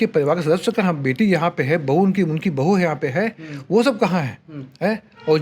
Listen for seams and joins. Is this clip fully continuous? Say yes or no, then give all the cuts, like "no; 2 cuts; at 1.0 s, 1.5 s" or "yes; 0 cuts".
yes; 0 cuts